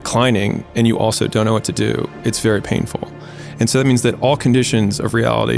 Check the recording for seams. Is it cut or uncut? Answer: uncut